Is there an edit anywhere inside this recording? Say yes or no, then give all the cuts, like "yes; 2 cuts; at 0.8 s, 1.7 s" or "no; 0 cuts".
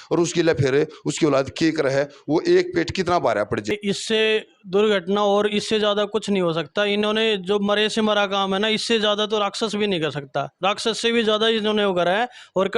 yes; 1 cut; at 3.7 s